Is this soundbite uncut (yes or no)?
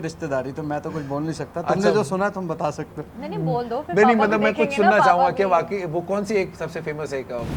yes